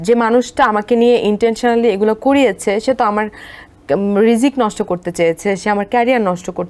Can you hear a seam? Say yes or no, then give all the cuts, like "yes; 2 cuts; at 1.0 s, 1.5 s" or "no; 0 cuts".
no; 0 cuts